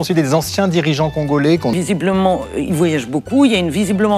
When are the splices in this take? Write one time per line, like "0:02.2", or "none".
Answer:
0:01.7